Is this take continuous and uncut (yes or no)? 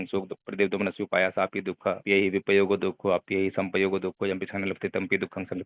no